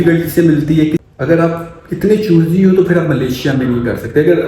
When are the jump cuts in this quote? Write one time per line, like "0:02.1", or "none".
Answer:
0:01.0